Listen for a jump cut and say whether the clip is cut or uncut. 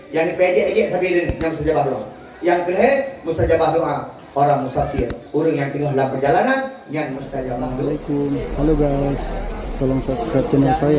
cut